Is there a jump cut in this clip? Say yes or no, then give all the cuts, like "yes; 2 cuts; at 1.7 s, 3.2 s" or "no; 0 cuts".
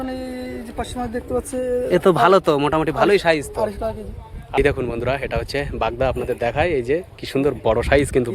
yes; 1 cut; at 4.6 s